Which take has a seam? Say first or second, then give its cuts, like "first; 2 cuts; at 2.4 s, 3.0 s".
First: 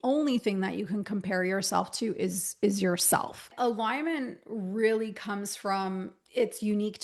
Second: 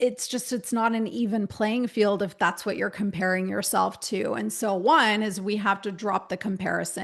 first; 1 cut; at 3.5 s